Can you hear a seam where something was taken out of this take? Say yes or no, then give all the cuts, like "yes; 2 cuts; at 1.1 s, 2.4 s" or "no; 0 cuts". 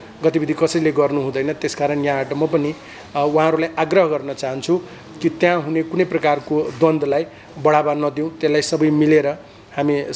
no; 0 cuts